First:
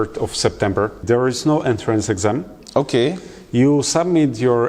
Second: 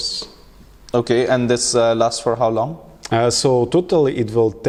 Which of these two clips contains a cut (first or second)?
first